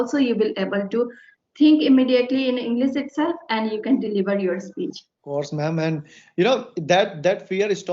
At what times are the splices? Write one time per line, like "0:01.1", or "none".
0:05.2